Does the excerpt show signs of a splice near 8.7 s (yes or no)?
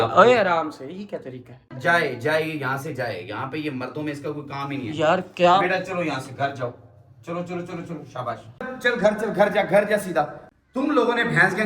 yes